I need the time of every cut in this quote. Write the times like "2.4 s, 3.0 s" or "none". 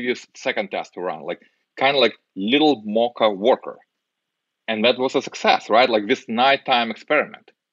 none